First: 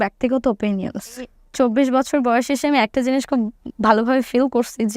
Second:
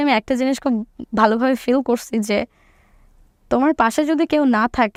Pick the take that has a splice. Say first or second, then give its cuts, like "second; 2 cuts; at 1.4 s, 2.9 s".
first; 1 cut; at 1.3 s